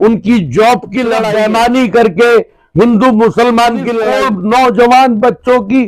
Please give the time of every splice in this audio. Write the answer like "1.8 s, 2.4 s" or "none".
1.2 s, 4.0 s